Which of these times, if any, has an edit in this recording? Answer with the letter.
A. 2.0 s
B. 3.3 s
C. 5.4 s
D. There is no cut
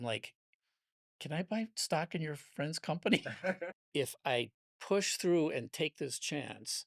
B